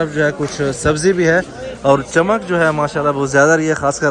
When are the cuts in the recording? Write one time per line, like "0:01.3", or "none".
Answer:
none